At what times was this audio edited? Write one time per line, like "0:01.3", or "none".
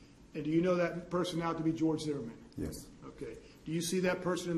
0:01.0